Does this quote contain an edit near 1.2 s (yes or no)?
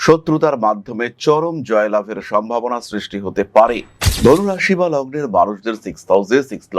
no